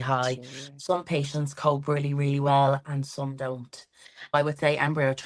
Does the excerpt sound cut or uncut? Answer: cut